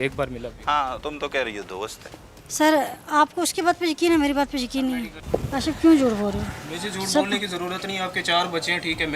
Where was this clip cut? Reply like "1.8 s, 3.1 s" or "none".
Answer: 5.1 s